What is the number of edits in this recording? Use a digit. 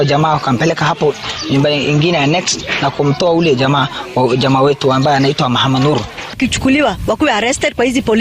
1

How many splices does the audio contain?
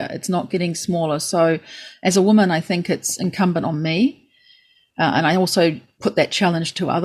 1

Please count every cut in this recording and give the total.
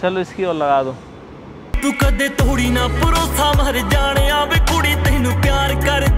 1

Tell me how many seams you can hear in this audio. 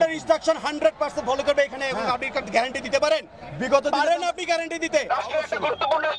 1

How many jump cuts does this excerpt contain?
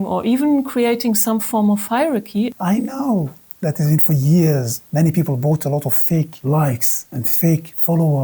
2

